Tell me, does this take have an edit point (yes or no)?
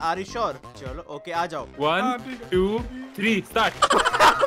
yes